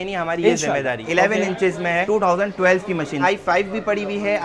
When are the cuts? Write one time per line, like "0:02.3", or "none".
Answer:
0:01.0
0:03.2